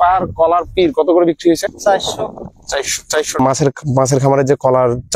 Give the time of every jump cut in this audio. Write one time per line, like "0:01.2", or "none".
0:03.4